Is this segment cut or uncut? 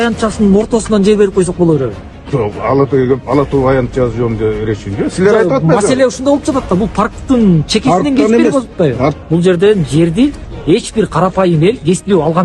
cut